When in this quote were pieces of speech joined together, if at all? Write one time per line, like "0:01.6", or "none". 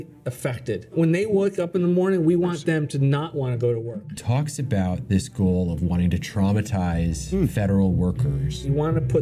0:04.2